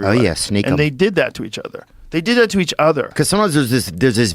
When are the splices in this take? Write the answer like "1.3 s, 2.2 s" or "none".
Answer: 3.1 s